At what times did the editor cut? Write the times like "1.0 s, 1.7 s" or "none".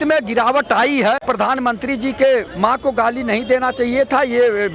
1.2 s, 2.5 s